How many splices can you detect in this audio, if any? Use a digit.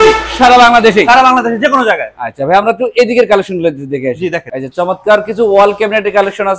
0